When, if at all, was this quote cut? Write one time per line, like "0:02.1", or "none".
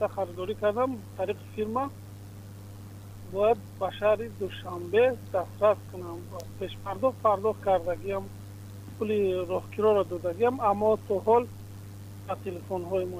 none

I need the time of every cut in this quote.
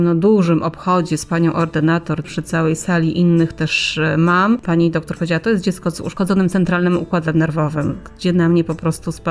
0:02.3
0:04.6
0:06.1

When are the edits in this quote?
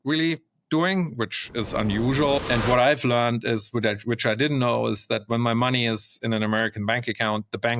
0:02.4

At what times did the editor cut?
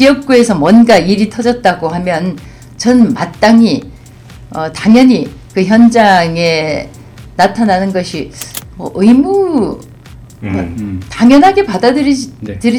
none

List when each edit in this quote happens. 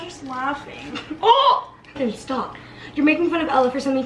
0:02.0

